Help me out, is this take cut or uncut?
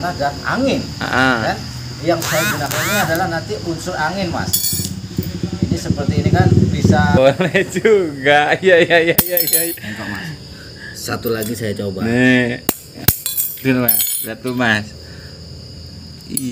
cut